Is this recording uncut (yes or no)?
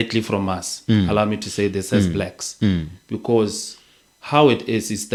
yes